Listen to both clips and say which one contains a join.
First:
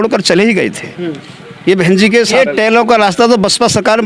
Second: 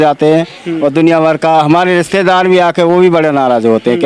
first; 1 cut; at 2.3 s

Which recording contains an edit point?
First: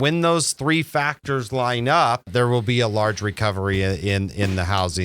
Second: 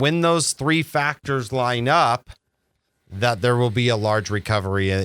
first; 1 cut; at 2.3 s

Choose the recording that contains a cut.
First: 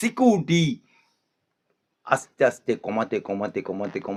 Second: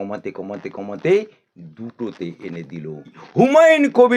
second; 1 cut; at 3.2 s

